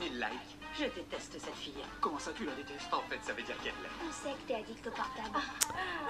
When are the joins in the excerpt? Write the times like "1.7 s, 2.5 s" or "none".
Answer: none